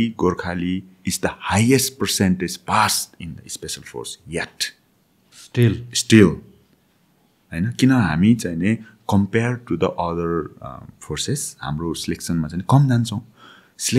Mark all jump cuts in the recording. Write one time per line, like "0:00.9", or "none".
none